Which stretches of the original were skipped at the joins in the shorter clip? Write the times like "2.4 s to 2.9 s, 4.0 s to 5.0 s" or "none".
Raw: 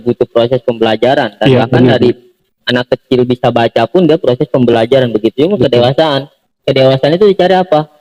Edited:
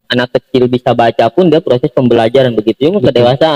none